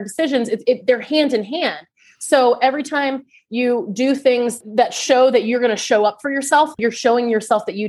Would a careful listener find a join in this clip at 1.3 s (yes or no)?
no